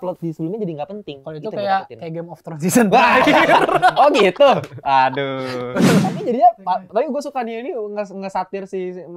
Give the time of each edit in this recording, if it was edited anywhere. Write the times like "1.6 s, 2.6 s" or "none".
6.0 s